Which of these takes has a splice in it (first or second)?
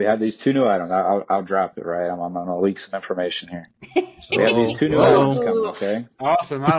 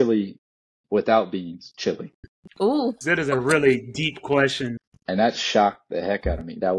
second